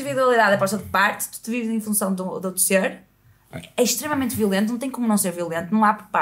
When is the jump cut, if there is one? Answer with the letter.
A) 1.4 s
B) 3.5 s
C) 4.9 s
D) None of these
D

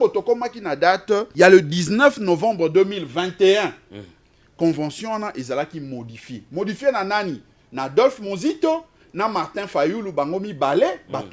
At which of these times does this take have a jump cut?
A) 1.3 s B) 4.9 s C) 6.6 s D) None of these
A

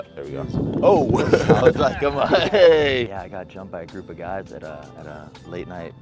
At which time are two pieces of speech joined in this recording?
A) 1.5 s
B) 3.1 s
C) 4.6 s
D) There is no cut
B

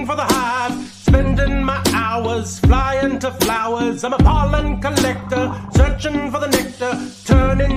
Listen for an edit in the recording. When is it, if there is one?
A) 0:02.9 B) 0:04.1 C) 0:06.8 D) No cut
D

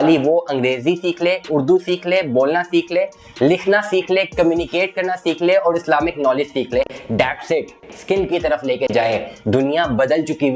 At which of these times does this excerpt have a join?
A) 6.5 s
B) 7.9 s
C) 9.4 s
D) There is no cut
B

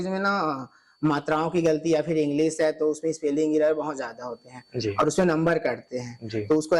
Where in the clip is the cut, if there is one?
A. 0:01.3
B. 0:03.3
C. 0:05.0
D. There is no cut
D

